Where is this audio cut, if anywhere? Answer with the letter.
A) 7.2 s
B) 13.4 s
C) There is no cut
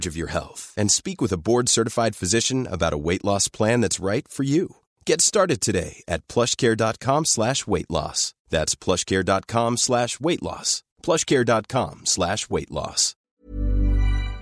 B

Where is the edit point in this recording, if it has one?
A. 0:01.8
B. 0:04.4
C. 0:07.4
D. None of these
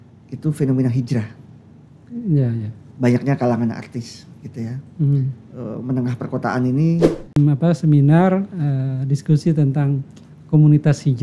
C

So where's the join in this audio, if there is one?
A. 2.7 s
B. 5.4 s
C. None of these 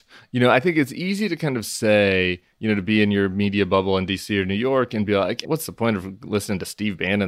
B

